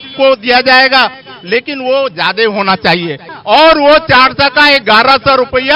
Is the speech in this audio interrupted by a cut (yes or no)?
yes